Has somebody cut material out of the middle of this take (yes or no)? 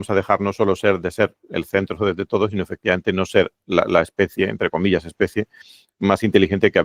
no